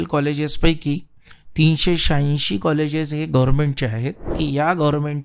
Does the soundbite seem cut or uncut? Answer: cut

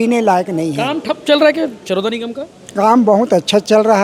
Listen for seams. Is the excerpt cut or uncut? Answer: uncut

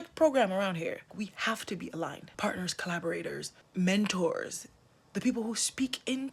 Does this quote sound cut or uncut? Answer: cut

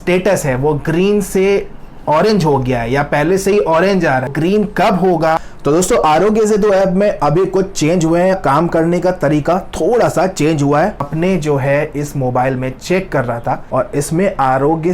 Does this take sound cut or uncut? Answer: cut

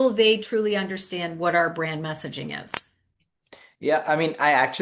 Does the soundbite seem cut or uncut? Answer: uncut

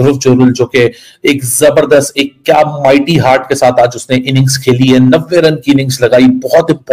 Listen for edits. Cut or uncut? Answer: uncut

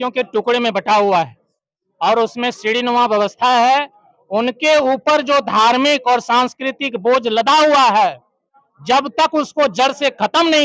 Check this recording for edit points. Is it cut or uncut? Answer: uncut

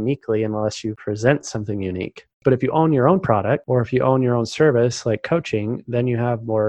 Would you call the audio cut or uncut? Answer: cut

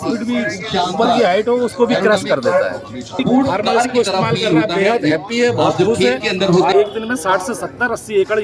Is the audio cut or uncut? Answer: cut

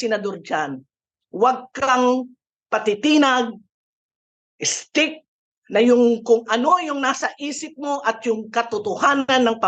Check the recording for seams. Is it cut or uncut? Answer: uncut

